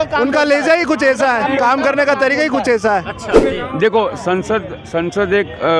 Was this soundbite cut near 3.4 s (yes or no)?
yes